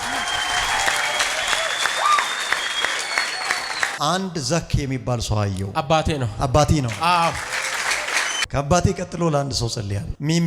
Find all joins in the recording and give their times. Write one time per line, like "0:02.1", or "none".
0:03.9
0:08.4

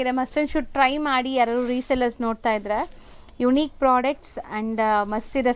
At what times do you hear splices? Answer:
none

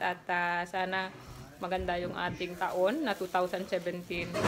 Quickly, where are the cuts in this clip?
0:02.5

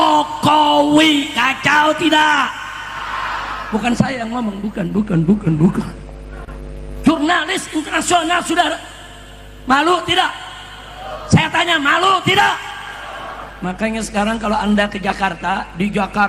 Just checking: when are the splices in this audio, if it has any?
none

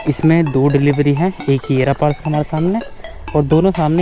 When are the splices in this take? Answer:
none

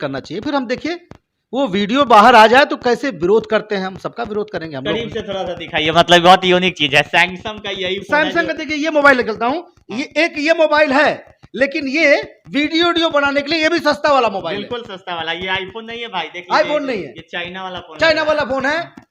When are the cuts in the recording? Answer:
0:04.9

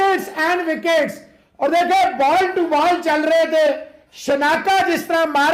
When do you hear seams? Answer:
none

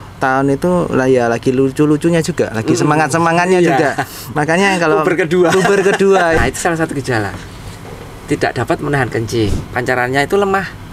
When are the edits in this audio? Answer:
0:06.4
0:09.5

